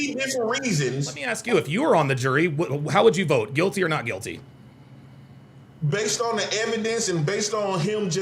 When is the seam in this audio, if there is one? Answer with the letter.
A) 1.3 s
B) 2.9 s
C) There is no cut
A